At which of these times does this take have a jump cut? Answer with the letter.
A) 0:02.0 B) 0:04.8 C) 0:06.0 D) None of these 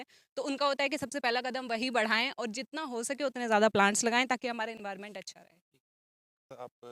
D